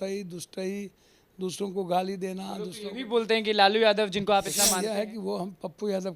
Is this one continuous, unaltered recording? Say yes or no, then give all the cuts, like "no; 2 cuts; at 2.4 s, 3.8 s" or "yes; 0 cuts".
no; 1 cut; at 4.6 s